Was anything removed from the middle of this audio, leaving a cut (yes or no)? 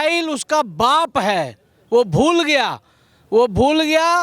no